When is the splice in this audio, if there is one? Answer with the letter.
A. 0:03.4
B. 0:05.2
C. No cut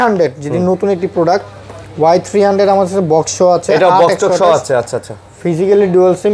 C